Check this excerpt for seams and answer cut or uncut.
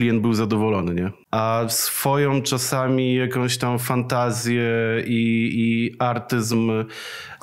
cut